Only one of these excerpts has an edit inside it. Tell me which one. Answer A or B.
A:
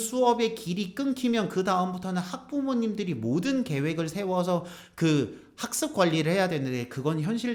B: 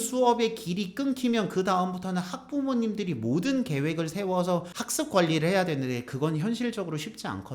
B